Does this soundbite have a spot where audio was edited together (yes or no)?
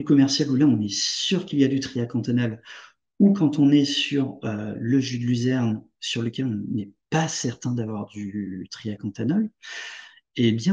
no